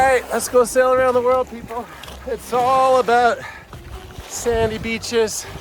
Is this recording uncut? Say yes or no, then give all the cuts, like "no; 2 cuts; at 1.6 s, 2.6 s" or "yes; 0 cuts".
no; 1 cut; at 2.1 s